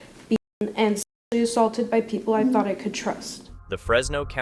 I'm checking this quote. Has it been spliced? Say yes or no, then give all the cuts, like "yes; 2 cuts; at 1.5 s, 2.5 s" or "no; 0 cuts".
no; 0 cuts